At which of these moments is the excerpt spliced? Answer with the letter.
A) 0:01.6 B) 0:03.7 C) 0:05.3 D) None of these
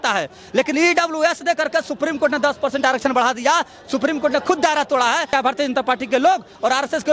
C